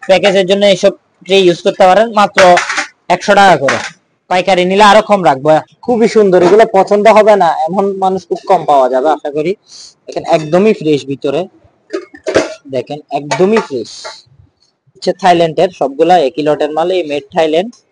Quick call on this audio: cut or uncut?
cut